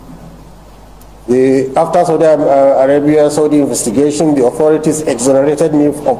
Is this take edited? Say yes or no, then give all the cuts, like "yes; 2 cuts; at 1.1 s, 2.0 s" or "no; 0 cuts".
no; 0 cuts